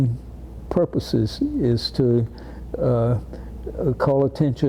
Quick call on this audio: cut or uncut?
uncut